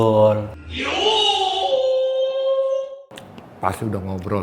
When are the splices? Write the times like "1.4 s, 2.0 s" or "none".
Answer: none